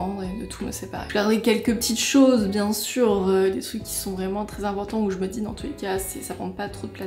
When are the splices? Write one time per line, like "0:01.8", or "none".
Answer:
none